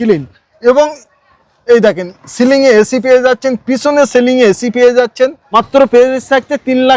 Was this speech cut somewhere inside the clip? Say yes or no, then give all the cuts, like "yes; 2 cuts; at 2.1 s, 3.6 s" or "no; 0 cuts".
yes; 1 cut; at 5.4 s